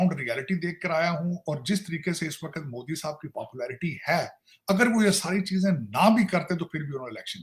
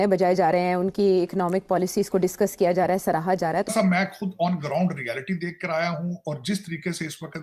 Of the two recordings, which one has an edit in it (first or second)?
second